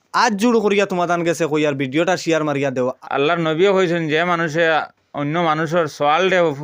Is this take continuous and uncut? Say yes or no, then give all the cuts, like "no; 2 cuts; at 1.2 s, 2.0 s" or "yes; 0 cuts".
no; 1 cut; at 3.0 s